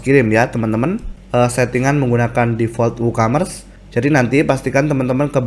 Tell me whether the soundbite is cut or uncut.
cut